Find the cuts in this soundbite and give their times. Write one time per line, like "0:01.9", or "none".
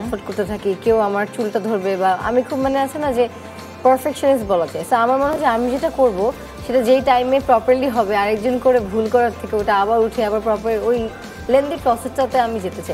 none